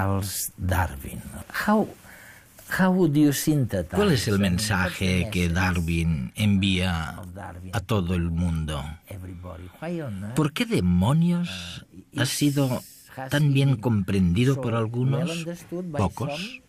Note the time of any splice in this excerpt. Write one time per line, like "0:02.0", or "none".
none